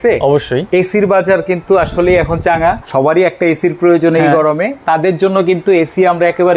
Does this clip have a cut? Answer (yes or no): yes